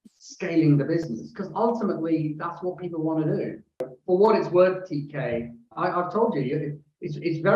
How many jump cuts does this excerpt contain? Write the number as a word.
two